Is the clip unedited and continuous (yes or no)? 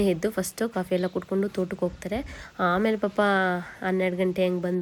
yes